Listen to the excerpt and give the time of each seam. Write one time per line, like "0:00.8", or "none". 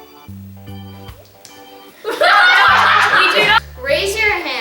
0:03.6